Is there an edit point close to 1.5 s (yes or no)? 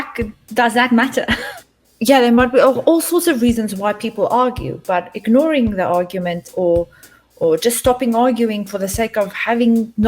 yes